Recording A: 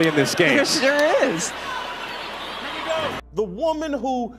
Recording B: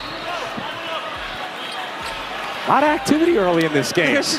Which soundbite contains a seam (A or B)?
A